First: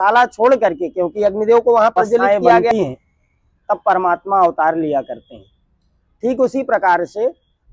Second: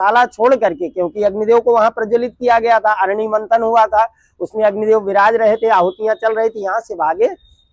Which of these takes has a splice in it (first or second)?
first